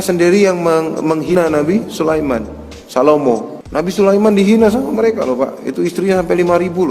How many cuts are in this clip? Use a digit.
2